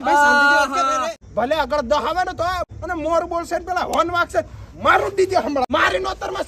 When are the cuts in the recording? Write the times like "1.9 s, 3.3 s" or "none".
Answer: 1.2 s, 2.7 s, 5.7 s